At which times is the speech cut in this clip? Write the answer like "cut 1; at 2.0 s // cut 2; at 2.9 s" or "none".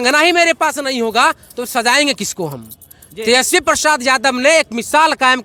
none